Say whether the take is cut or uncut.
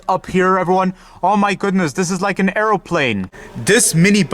cut